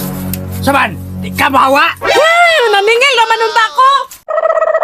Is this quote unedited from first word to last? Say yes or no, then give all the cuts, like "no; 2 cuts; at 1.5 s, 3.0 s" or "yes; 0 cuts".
yes; 0 cuts